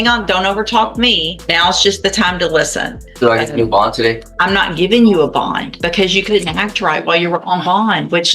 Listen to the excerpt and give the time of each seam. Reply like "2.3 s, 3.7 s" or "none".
1.3 s, 3.0 s, 4.3 s, 5.7 s